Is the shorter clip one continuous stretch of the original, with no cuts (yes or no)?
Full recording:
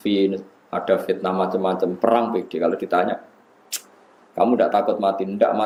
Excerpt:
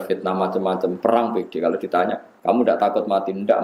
no